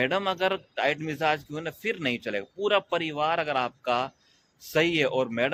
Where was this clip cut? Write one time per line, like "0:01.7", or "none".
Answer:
none